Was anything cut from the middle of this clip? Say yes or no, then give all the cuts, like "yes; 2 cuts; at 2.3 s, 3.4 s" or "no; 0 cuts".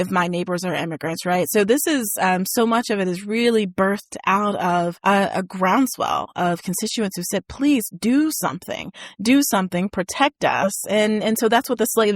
yes; 1 cut; at 5.0 s